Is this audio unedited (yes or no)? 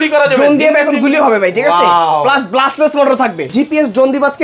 no